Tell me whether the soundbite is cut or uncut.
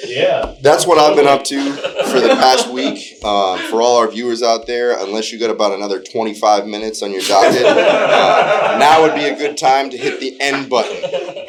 uncut